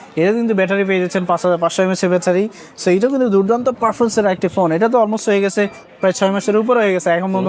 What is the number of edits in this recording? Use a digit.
0